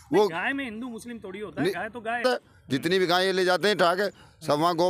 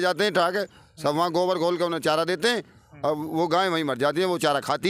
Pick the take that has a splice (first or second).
first